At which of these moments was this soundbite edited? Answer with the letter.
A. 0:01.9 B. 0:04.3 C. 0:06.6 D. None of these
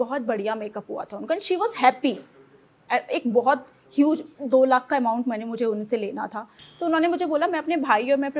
C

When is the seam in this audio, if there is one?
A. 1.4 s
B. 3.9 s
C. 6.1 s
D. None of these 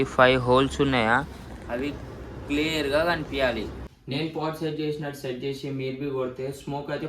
B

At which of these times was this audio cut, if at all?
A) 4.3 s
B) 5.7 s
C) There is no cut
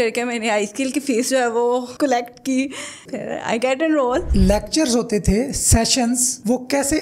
A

